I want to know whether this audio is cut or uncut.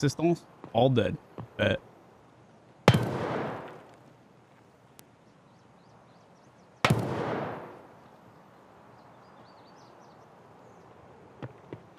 uncut